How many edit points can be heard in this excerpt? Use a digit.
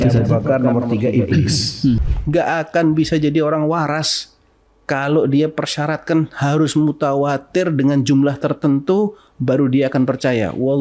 1